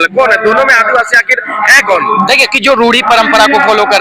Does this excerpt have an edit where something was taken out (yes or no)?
yes